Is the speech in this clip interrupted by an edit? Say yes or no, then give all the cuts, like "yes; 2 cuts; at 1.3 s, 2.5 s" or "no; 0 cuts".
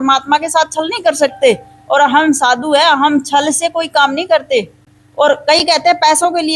no; 0 cuts